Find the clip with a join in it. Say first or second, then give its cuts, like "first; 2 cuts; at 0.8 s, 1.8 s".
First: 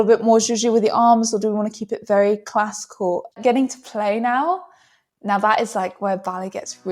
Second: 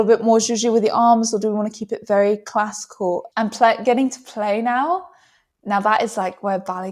first; 1 cut; at 3.4 s